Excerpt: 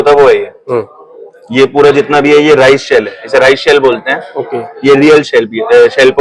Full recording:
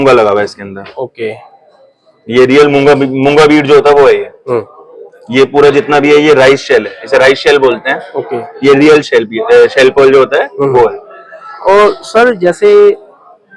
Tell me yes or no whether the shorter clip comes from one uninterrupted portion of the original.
yes